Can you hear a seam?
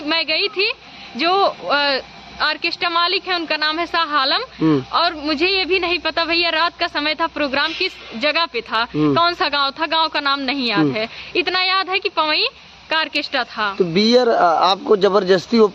no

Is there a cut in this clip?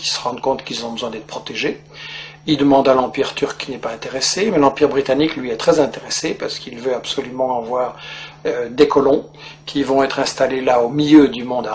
no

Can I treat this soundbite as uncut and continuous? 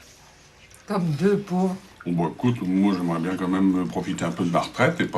yes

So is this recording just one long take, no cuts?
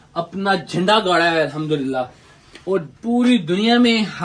yes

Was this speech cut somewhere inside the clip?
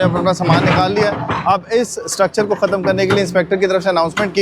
no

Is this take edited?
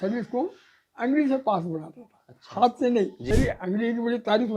yes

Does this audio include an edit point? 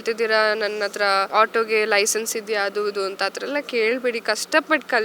yes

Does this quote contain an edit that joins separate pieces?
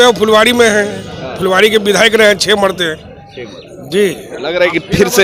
no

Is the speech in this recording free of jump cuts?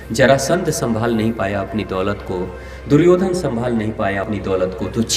no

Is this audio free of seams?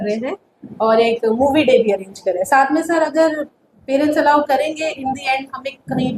yes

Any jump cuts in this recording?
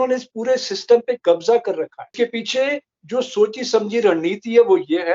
yes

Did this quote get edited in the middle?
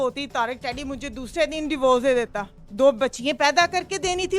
no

